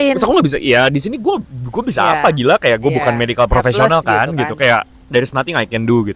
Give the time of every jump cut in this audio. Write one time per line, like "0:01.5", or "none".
none